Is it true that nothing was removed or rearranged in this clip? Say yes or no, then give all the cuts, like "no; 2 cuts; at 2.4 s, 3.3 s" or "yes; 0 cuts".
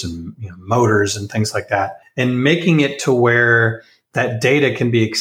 no; 1 cut; at 2.0 s